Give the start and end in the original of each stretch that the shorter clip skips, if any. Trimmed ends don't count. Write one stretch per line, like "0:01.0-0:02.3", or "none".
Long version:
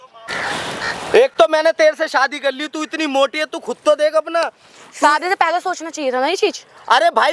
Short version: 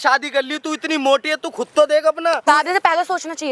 0:04.5-0:05.0